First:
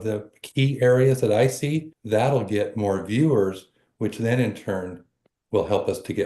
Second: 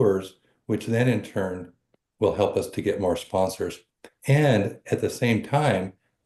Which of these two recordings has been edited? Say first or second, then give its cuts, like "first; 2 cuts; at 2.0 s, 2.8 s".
first; 1 cut; at 1.9 s